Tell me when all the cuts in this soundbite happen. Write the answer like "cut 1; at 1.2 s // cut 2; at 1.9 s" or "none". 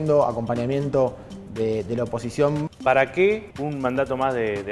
cut 1; at 2.7 s // cut 2; at 3.5 s